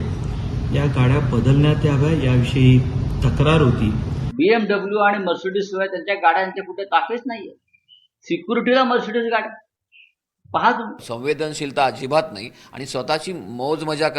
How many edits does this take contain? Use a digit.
2